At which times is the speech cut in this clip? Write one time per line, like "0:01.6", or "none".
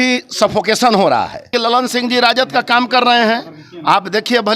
0:01.5